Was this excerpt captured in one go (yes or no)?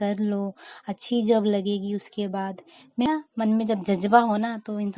no